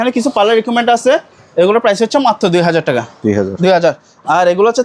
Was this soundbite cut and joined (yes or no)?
no